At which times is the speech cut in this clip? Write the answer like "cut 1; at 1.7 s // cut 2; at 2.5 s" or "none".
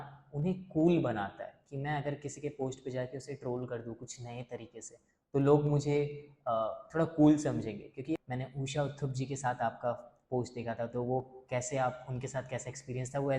cut 1; at 8.2 s

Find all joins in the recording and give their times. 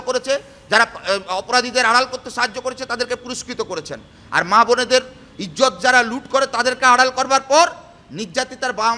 none

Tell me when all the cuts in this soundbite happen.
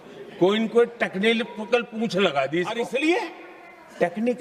none

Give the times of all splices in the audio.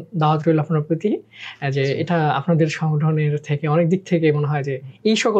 none

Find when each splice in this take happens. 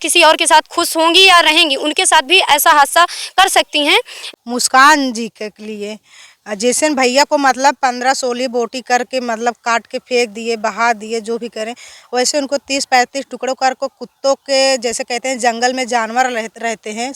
cut 1; at 4.2 s

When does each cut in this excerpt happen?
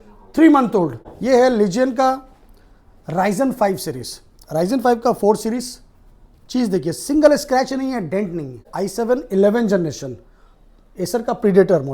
cut 1; at 1.1 s // cut 2; at 8.7 s

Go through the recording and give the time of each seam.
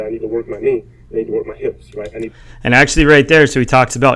none

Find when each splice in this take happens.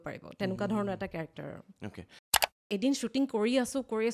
cut 1; at 2.6 s

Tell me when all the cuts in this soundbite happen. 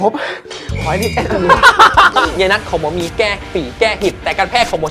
cut 1; at 2.3 s

